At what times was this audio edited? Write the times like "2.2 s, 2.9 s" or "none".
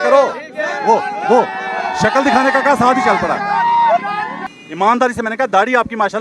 4.4 s